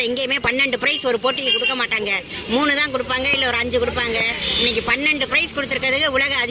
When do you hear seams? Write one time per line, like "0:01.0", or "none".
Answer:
none